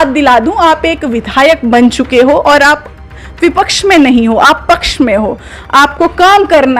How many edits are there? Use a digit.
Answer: 0